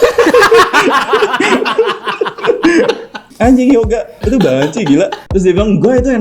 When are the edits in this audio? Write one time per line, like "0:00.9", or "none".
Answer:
0:03.2
0:05.2